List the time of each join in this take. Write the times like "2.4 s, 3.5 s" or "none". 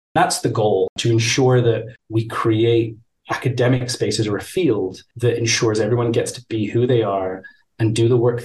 0.9 s, 2.0 s